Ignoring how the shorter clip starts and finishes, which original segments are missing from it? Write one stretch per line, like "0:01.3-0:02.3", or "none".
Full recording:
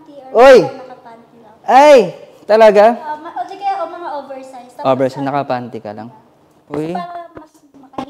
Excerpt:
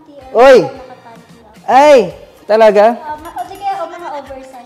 none